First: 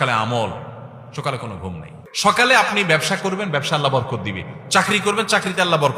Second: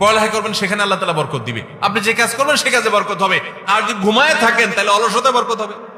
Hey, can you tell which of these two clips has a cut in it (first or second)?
first